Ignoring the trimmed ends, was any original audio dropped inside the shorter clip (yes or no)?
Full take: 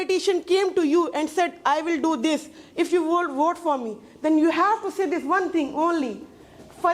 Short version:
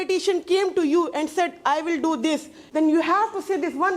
yes